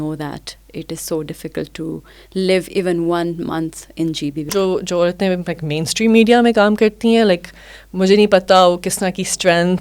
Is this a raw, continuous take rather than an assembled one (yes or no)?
no